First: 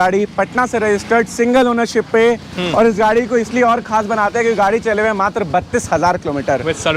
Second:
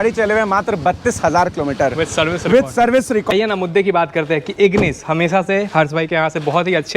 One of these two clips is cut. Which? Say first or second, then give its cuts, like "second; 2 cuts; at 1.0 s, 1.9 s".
second; 1 cut; at 3.3 s